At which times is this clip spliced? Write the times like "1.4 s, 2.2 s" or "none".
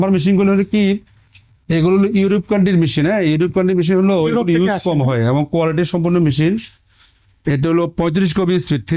none